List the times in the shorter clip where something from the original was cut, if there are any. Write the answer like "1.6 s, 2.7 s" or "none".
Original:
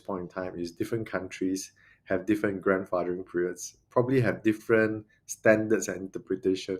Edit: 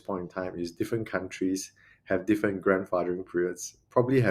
none

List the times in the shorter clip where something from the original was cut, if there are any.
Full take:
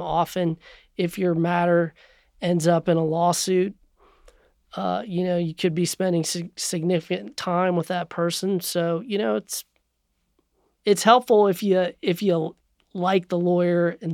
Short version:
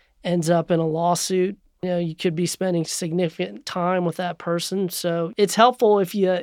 1.8 s, 2.9 s, 5.3 s

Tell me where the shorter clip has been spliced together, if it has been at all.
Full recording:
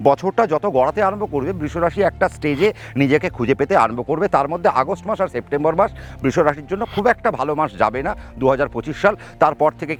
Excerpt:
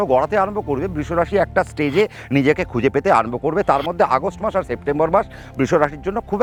none

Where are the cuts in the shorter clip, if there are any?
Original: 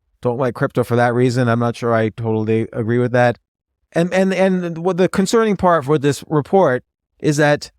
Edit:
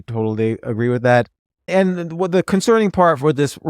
1.7 s

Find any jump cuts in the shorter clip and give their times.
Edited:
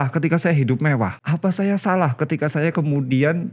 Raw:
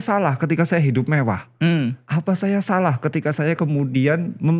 1.2 s

